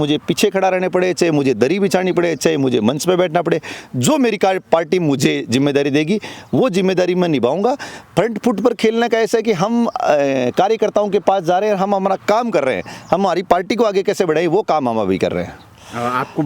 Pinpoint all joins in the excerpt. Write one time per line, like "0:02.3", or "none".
none